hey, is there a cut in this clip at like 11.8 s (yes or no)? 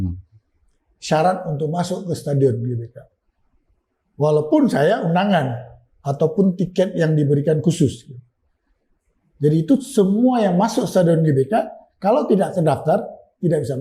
no